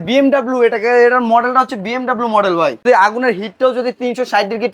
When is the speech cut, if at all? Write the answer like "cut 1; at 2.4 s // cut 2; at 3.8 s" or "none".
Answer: cut 1; at 2.8 s